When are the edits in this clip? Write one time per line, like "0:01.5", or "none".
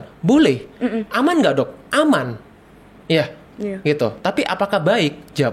none

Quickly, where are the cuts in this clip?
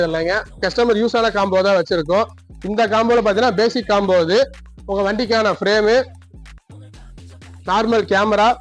none

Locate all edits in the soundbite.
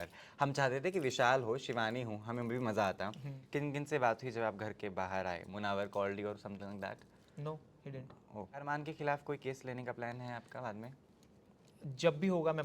0:03.4
0:08.6

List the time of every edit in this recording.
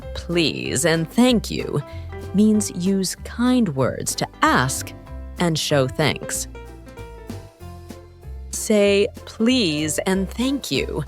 none

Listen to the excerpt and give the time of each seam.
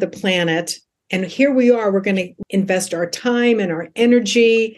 0:02.4

